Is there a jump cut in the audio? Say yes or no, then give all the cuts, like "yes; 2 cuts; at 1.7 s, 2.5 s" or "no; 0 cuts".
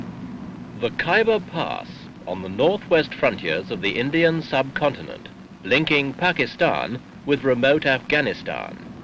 yes; 1 cut; at 0.9 s